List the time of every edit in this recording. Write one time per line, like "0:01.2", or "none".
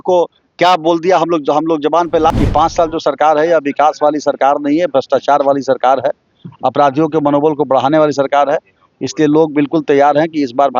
0:02.3